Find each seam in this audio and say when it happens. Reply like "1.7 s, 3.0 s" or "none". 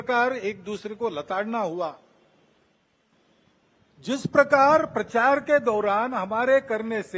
none

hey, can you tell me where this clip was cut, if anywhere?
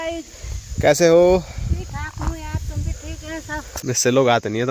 3.7 s

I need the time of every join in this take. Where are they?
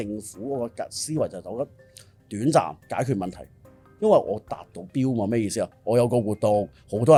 none

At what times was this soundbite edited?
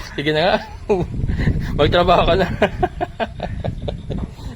none

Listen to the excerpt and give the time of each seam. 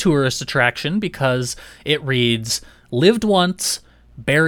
none

